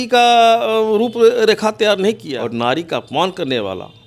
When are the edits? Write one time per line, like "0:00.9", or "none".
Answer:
0:02.3